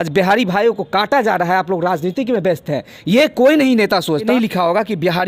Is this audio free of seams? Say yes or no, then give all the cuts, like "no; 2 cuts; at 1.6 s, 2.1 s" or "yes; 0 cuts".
no; 1 cut; at 4.3 s